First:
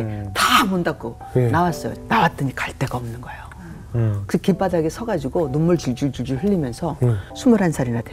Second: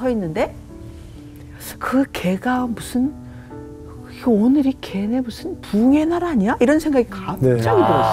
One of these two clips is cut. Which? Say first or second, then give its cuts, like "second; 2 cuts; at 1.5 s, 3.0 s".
first; 2 cuts; at 1.9 s, 7.3 s